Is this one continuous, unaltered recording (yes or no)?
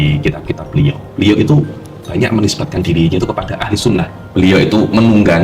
no